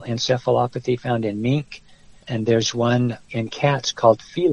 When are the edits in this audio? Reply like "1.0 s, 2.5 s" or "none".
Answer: 2.3 s